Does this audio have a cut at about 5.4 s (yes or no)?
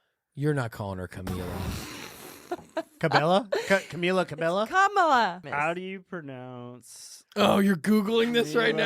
yes